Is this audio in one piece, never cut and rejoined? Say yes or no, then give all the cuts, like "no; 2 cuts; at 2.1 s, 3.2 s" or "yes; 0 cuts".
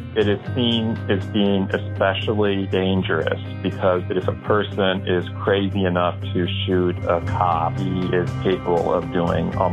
no; 3 cuts; at 2.7 s, 4.1 s, 7.8 s